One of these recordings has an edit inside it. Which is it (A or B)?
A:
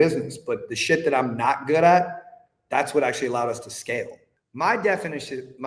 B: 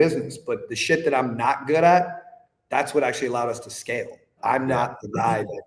A